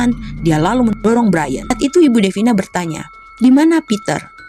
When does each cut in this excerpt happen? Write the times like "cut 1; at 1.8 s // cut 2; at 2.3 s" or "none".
cut 1; at 1.6 s